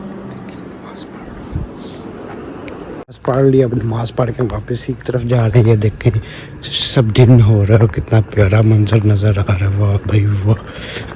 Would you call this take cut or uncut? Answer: cut